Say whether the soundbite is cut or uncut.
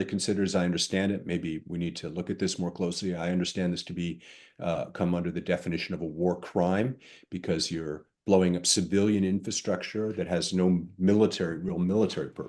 uncut